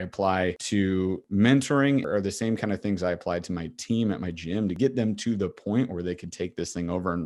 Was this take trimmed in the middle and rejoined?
yes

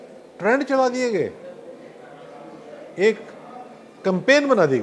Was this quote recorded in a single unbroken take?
yes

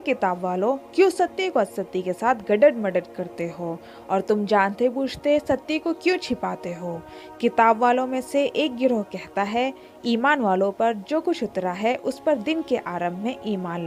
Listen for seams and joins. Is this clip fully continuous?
yes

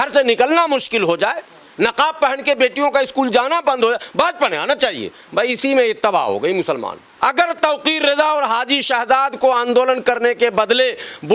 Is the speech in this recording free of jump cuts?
no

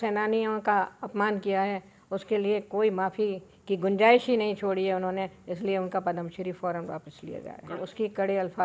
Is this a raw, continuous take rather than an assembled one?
yes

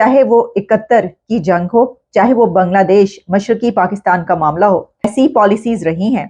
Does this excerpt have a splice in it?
yes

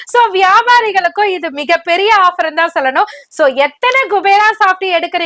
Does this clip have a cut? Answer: no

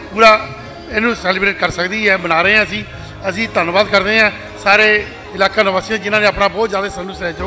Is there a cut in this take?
no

